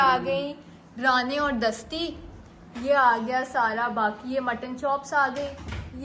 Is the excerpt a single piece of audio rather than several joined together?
yes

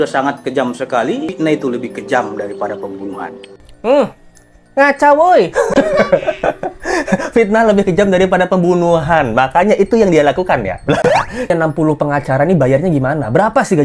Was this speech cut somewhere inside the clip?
yes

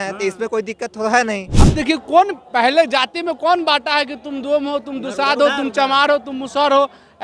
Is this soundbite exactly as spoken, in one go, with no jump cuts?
no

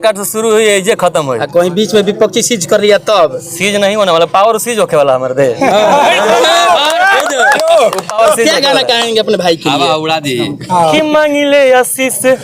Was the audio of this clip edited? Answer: no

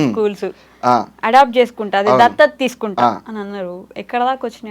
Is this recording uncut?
yes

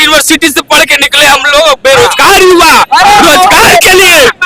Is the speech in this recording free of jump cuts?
yes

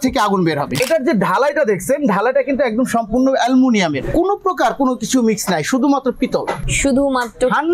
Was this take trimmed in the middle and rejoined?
yes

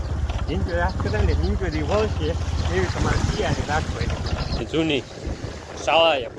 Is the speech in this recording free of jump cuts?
no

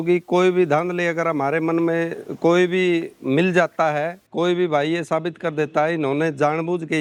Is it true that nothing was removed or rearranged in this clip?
yes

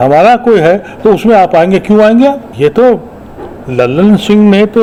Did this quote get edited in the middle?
no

